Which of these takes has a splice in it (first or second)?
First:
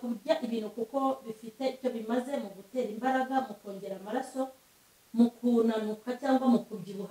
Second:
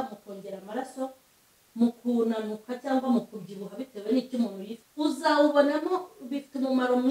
second